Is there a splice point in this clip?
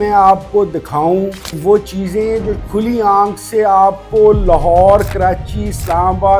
no; 0 cuts

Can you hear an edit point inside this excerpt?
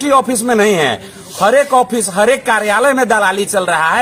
no; 0 cuts

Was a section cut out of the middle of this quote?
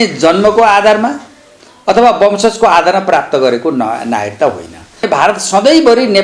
yes; 1 cut; at 5.0 s

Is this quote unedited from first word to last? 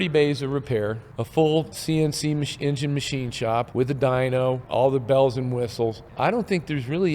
no; 5 cuts; at 1.1 s, 1.8 s, 3.7 s, 4.6 s, 6.1 s

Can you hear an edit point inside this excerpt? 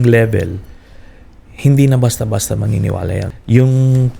yes; 1 cut; at 3.3 s

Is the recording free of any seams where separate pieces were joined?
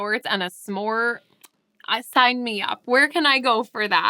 yes; 0 cuts

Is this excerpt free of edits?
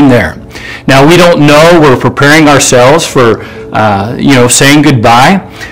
yes; 0 cuts

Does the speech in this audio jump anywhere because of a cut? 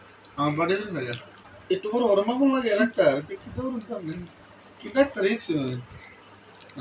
yes; 1 cut; at 1.2 s

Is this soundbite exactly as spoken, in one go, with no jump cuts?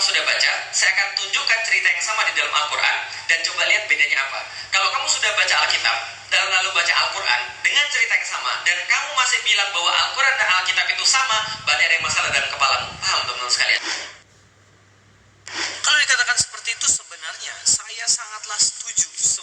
no; 1 cut; at 13.2 s

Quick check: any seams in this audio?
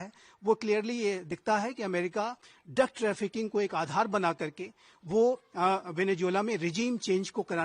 no; 0 cuts

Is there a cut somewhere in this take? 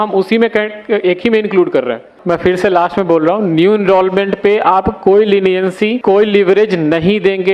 yes; 2 cuts; at 2.1 s, 6.0 s

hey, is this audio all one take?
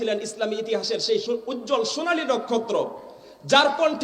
no; 1 cut; at 1.2 s

